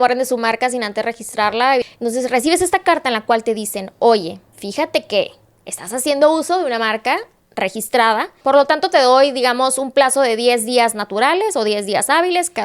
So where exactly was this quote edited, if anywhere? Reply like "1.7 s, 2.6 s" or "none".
1.8 s, 8.4 s